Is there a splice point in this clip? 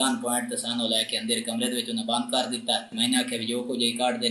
yes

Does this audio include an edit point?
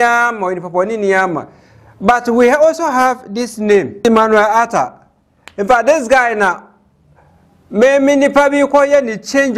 no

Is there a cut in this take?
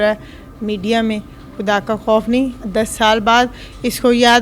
no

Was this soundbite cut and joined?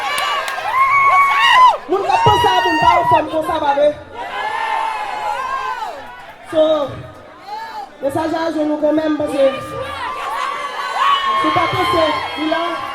yes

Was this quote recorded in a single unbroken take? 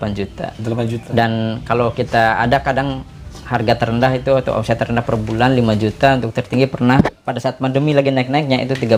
yes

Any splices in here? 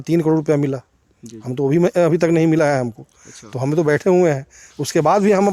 no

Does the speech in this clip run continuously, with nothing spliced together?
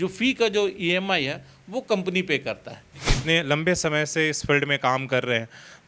no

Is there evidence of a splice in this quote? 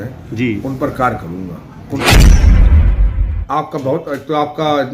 yes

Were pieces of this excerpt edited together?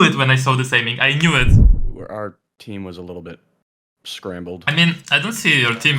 yes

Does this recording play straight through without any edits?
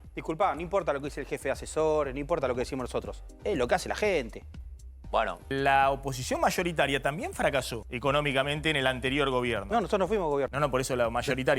no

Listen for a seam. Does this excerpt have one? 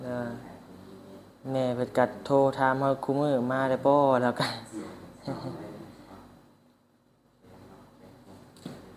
no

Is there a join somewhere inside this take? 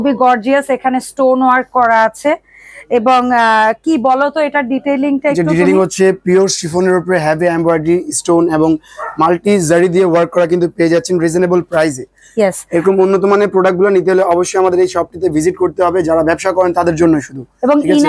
no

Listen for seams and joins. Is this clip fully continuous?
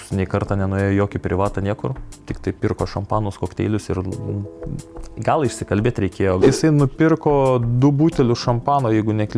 no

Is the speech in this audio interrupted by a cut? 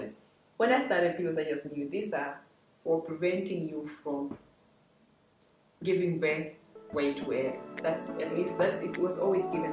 no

